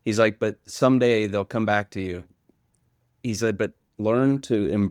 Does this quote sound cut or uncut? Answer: cut